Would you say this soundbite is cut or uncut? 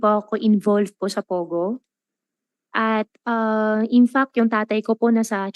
uncut